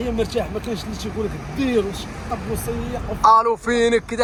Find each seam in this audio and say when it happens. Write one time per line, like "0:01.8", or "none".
none